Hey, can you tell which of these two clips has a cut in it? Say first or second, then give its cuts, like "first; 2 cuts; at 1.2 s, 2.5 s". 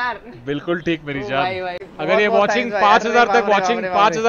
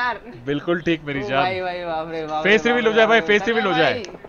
first; 1 cut; at 1.8 s